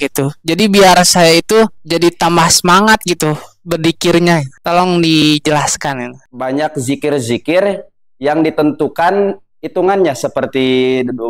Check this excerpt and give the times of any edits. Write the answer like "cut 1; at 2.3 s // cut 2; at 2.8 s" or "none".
cut 1; at 6.2 s

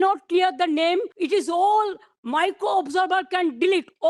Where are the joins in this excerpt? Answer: cut 1; at 1.1 s

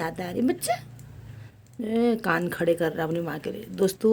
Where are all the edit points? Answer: none

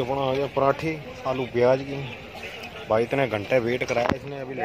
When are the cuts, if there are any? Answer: none

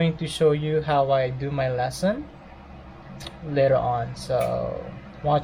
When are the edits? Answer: none

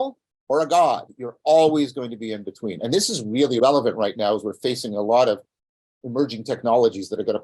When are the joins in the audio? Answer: cut 1; at 3.6 s

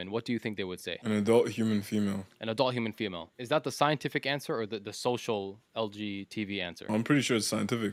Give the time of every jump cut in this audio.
none

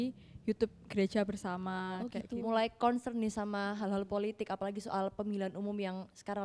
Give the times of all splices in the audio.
cut 1; at 2.2 s

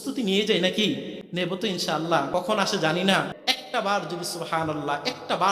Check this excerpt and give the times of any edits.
cut 1; at 1.2 s // cut 2; at 2.3 s // cut 3; at 3.3 s

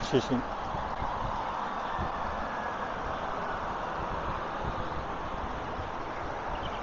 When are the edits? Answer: none

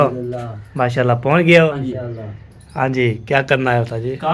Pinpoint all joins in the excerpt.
cut 1; at 1.7 s

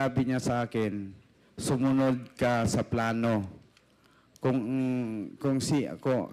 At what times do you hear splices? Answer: none

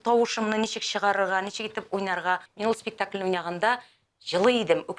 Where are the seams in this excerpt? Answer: cut 1; at 2.5 s

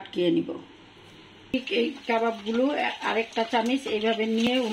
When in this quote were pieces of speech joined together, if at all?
cut 1; at 1.5 s

